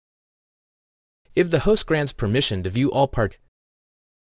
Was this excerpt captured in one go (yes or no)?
yes